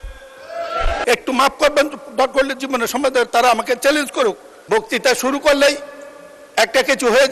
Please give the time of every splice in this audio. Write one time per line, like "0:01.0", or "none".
0:01.0
0:04.5